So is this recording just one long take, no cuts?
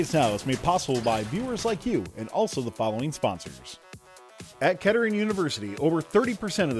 no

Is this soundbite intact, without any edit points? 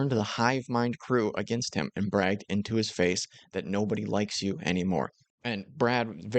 no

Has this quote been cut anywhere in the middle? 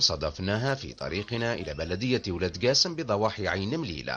yes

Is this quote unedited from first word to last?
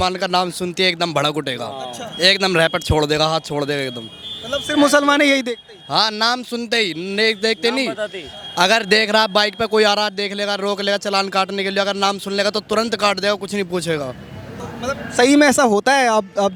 yes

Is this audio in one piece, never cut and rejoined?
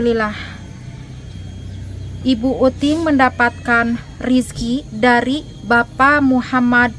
yes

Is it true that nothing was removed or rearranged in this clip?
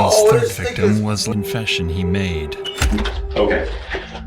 no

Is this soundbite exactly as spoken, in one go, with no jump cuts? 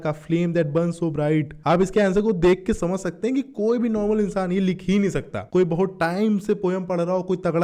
yes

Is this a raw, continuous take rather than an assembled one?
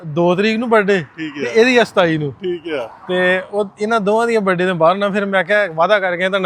yes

